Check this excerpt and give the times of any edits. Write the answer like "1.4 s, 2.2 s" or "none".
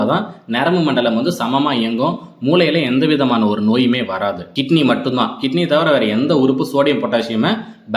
4.5 s